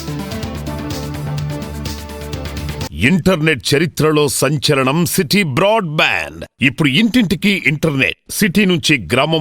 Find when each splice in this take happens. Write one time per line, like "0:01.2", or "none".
0:02.8